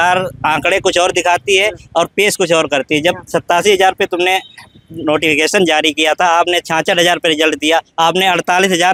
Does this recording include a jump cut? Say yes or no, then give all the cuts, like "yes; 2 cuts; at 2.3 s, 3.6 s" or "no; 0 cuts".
no; 0 cuts